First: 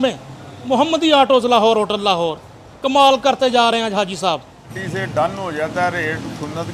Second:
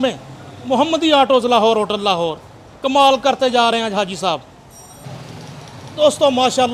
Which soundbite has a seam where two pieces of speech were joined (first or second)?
first